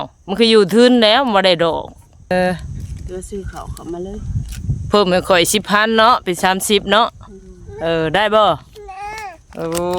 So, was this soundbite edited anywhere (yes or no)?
yes